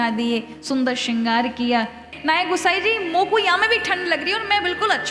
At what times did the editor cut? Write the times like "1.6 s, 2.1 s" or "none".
2.1 s